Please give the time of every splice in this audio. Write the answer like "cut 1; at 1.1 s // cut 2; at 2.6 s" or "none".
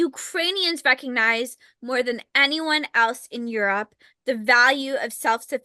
none

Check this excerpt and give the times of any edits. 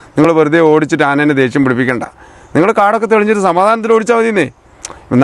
none

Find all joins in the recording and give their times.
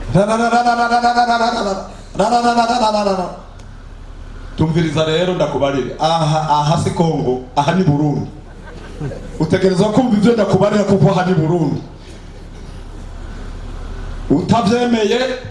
none

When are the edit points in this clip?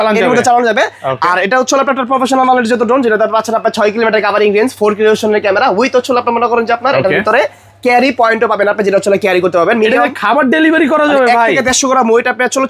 none

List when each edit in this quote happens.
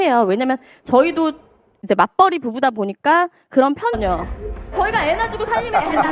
none

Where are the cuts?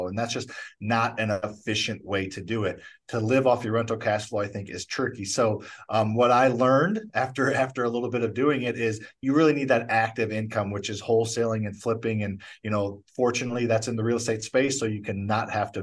none

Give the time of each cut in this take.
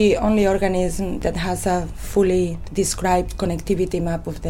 cut 1; at 1.2 s // cut 2; at 2.6 s

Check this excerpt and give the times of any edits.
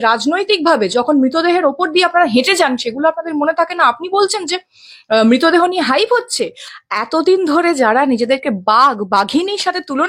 cut 1; at 6.7 s

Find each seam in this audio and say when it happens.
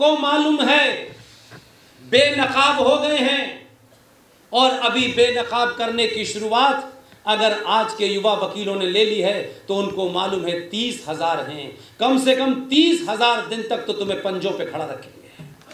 none

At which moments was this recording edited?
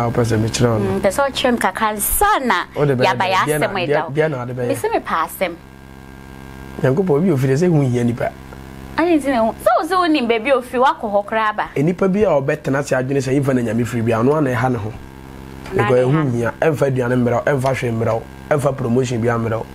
none

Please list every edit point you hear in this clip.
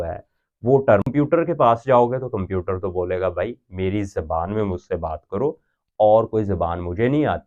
cut 1; at 1.1 s

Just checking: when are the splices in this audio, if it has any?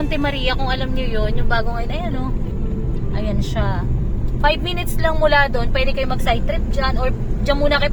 none

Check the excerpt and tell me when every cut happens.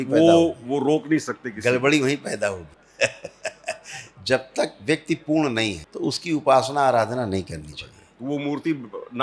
cut 1; at 2.8 s // cut 2; at 5.8 s

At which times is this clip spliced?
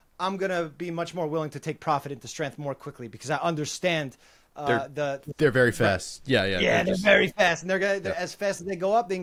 none

